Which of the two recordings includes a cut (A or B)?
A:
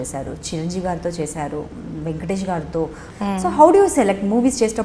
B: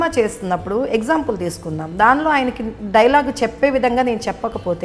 A